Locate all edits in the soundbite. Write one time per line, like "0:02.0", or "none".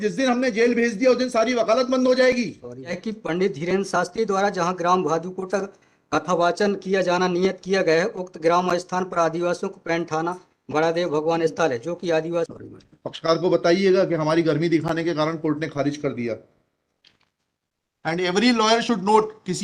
0:03.0
0:12.5
0:17.1